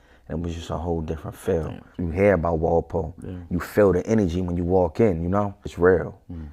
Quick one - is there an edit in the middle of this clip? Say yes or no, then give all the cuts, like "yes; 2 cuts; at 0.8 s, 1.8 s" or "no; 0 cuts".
yes; 2 cuts; at 1.9 s, 5.7 s